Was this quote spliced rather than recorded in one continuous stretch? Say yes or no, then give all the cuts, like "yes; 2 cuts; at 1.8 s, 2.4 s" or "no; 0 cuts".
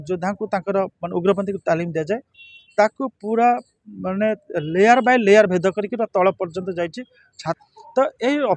yes; 1 cut; at 7.6 s